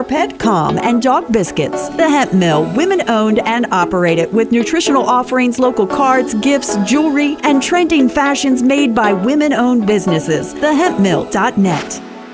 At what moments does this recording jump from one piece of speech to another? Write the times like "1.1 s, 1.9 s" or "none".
none